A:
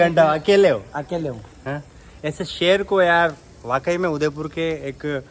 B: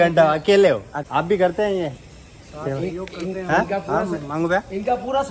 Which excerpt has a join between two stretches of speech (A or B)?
B